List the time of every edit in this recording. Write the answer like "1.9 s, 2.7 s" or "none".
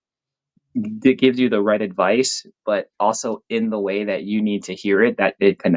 none

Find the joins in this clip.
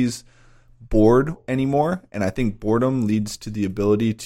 1.4 s

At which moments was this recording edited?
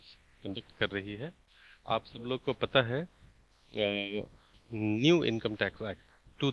none

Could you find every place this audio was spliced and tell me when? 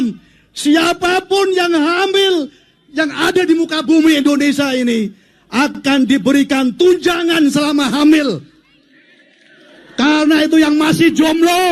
none

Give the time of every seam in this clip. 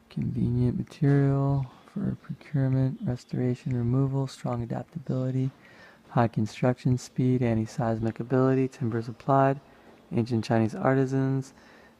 7.1 s

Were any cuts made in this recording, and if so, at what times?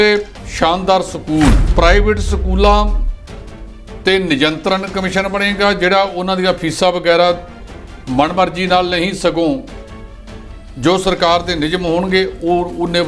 1.6 s

